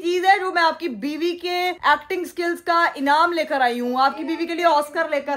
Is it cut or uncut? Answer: uncut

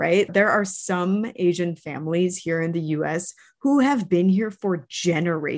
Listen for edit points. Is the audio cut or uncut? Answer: uncut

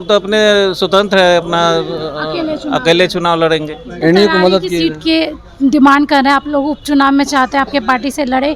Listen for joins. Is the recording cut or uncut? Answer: cut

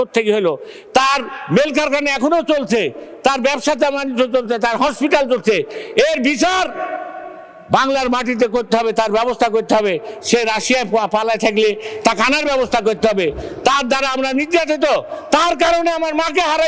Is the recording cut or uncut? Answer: uncut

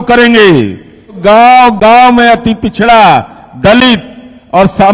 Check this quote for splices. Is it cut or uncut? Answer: cut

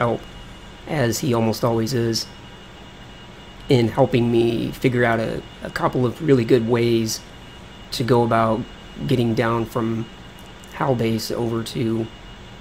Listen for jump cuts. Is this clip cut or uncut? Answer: cut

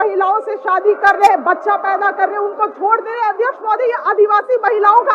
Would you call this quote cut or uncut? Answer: uncut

